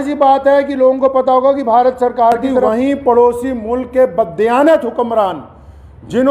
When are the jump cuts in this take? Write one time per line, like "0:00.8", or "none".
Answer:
0:02.7